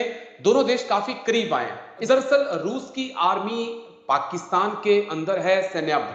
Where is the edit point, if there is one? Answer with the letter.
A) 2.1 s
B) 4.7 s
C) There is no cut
A